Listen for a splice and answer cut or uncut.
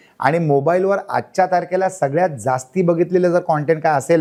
uncut